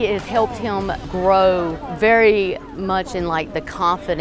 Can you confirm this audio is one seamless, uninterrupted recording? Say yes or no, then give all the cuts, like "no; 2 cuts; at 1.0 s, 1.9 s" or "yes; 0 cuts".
no; 2 cuts; at 1.0 s, 1.8 s